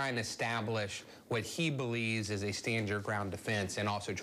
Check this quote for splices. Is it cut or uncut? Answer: cut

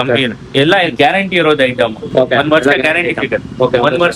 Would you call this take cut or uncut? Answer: uncut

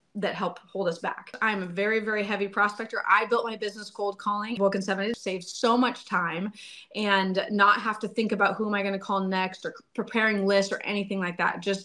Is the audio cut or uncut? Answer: cut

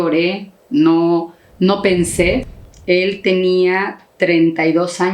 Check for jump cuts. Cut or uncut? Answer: cut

